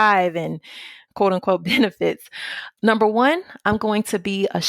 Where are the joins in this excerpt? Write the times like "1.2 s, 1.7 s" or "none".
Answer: 0.9 s

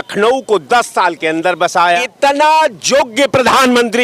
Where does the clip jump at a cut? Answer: 2.1 s

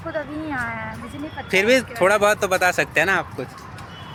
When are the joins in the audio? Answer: none

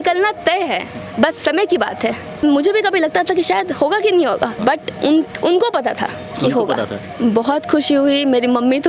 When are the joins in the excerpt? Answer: 1.0 s, 2.4 s, 4.6 s

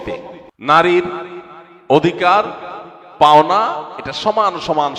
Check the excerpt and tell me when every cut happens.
none

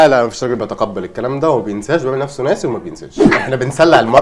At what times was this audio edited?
3.3 s

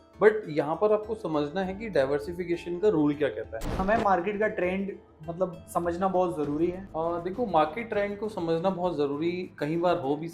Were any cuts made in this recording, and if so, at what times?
3.8 s, 6.8 s

